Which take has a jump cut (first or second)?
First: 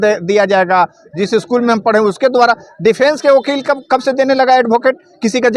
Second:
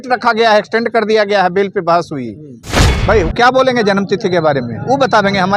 second